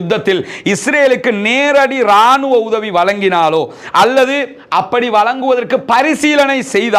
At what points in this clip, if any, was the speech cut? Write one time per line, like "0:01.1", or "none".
none